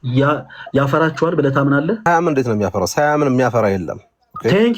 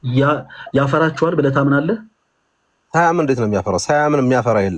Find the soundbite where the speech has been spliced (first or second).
first